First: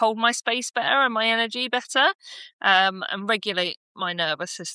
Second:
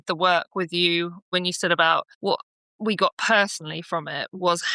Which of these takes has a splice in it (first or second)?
second